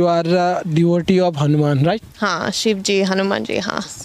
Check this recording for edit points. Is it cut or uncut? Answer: uncut